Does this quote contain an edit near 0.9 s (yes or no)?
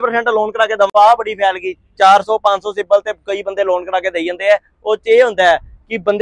yes